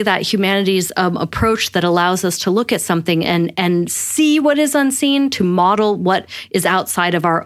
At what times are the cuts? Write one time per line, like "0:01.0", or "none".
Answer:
none

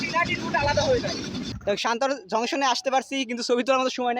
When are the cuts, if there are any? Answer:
0:01.4

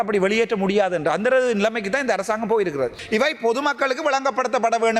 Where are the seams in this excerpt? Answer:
0:03.0

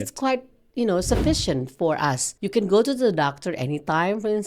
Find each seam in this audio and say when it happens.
0:02.3

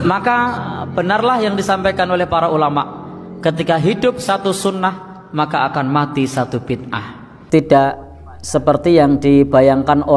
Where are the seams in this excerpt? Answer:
0:07.3

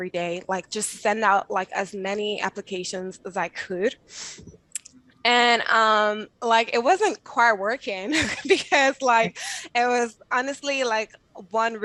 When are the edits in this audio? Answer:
none

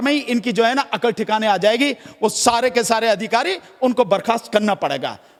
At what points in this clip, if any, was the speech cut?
none

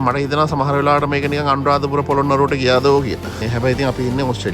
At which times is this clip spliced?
0:03.4

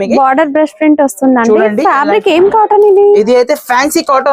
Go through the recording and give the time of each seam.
none

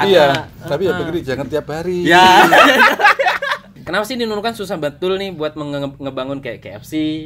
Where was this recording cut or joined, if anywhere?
0:03.8

